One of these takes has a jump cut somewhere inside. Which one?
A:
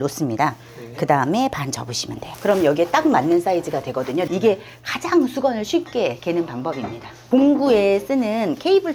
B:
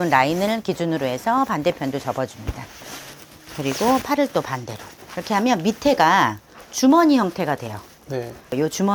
A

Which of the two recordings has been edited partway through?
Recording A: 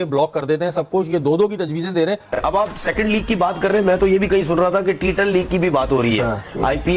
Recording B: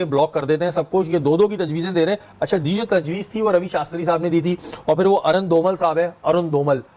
A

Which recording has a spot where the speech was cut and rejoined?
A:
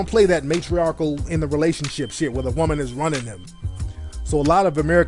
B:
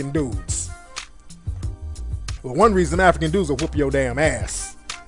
A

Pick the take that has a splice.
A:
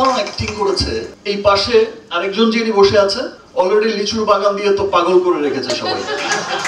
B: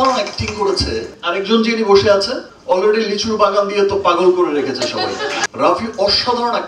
B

